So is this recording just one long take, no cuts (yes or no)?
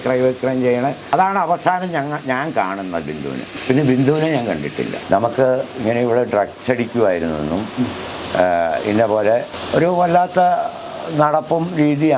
no